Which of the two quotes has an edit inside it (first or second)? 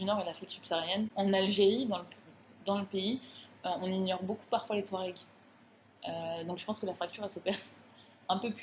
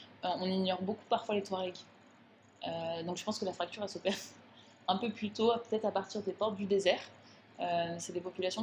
first